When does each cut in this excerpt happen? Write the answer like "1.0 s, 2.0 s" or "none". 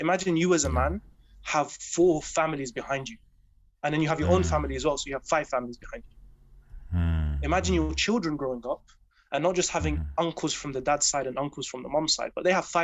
none